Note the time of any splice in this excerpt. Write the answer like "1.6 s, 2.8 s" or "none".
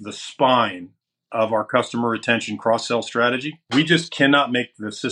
3.6 s